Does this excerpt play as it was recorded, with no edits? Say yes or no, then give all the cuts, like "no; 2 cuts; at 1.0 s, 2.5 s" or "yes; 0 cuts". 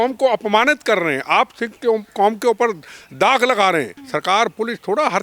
no; 1 cut; at 4.0 s